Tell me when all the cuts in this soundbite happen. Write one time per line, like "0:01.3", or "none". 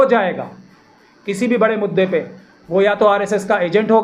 none